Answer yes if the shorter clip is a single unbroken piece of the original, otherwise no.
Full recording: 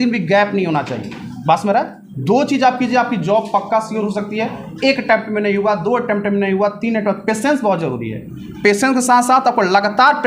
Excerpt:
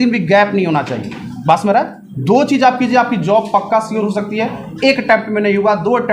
yes